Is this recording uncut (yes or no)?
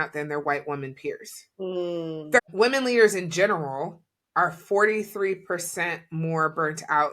no